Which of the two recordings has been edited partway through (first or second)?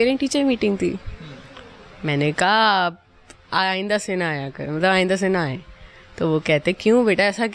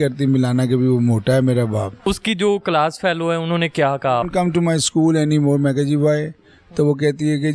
second